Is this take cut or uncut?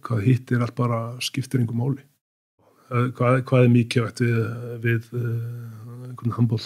cut